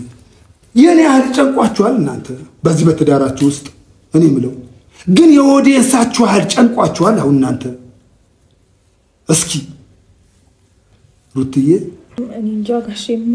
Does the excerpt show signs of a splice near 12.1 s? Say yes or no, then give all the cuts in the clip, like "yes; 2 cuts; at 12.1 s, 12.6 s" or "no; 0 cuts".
yes; 1 cut; at 12.1 s